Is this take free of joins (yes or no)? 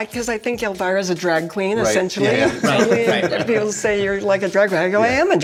yes